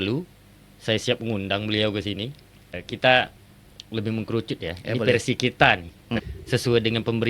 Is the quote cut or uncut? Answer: cut